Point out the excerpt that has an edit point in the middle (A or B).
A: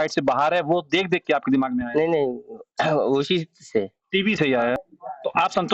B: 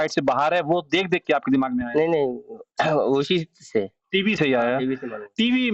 A